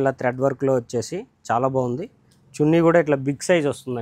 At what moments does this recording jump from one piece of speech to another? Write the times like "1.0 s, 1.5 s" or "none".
none

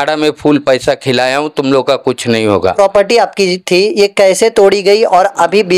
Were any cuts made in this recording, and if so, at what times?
2.7 s

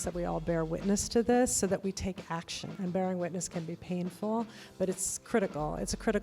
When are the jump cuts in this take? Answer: 2.7 s

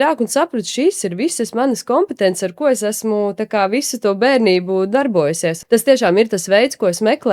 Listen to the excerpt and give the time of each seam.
5.6 s

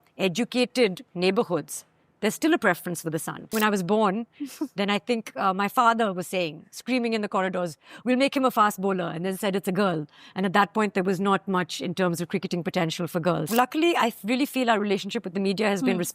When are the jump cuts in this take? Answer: 3.5 s, 13.5 s

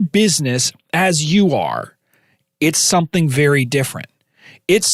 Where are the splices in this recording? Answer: none

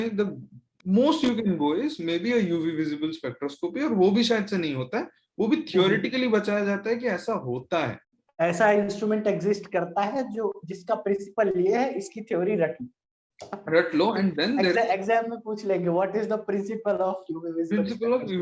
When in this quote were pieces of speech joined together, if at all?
none

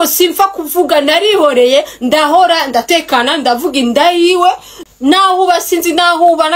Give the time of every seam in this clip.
4.7 s

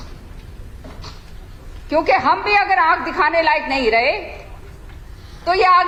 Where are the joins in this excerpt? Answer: none

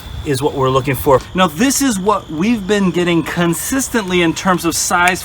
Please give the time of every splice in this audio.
1.2 s

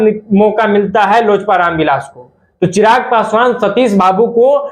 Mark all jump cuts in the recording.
none

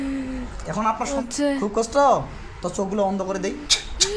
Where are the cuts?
1.2 s

